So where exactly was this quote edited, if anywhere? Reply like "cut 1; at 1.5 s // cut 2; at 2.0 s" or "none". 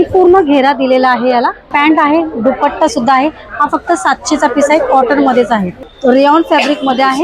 cut 1; at 1.7 s // cut 2; at 5.9 s